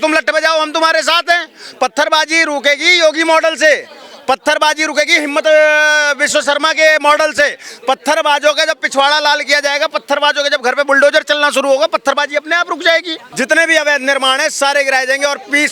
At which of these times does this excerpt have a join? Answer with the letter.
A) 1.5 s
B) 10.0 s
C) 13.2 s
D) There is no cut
C